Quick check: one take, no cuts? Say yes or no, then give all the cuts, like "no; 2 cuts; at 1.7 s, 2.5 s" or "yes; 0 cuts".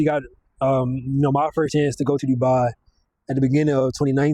yes; 0 cuts